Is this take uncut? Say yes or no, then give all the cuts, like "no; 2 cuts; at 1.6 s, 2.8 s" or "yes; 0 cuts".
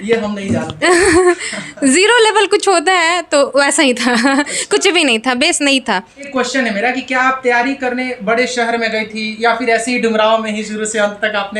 no; 1 cut; at 6.3 s